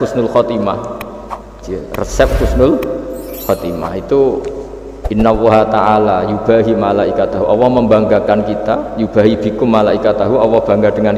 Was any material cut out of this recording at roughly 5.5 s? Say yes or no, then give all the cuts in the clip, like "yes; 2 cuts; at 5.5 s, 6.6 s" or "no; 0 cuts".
no; 1 cut; at 1.7 s